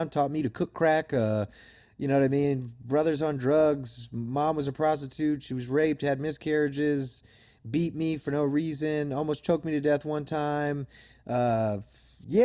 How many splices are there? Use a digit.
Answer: 0